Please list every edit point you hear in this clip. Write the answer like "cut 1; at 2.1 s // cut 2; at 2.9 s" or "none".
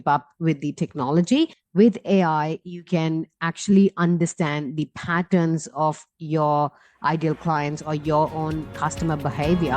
cut 1; at 1.6 s